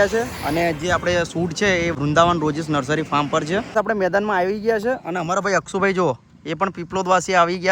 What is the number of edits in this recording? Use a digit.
2